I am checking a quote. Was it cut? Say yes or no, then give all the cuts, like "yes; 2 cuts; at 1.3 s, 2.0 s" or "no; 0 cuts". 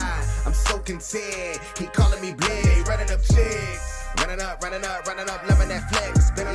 no; 0 cuts